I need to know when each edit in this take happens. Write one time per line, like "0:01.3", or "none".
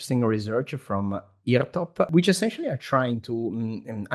0:02.1